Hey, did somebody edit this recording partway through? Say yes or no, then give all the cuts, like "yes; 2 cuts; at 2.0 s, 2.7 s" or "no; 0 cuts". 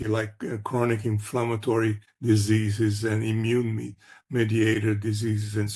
no; 0 cuts